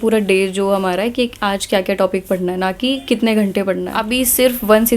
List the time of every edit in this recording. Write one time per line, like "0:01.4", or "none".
0:04.0